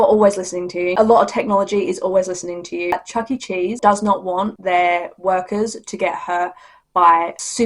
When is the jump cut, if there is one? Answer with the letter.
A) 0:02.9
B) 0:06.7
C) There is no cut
A